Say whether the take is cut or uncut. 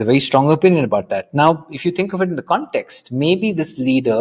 uncut